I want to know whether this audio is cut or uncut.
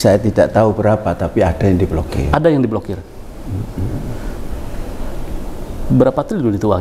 uncut